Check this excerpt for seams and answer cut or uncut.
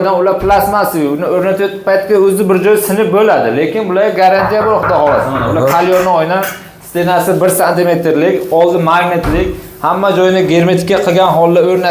uncut